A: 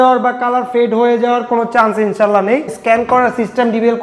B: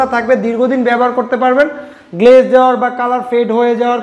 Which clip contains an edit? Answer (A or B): A